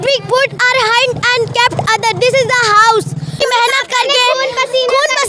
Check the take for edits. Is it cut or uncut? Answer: uncut